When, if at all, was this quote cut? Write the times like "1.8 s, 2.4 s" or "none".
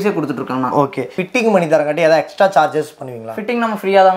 1.2 s